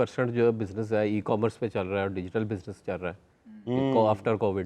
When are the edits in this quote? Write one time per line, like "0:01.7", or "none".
none